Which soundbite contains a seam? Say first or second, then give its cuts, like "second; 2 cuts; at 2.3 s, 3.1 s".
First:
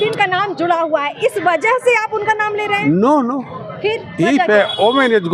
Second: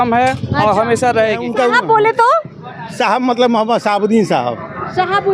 second; 1 cut; at 1.4 s